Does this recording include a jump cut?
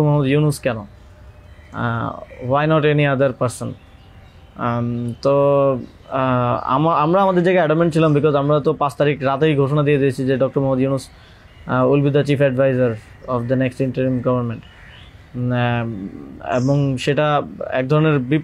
no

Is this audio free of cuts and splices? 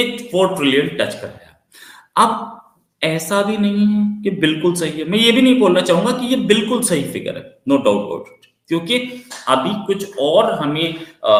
yes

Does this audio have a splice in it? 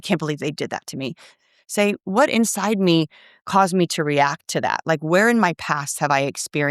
no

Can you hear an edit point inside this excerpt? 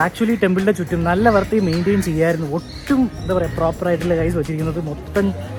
no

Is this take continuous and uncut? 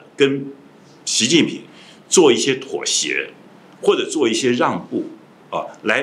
yes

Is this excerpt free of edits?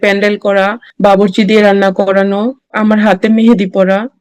no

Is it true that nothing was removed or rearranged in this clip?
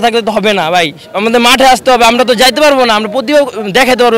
yes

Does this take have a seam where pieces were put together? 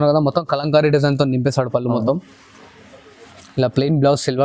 no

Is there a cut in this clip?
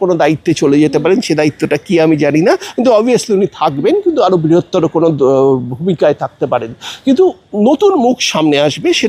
no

